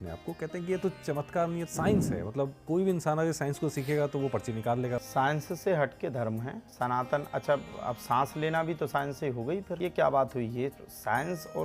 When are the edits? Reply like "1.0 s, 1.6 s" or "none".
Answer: 1.7 s, 5.0 s, 6.6 s, 9.7 s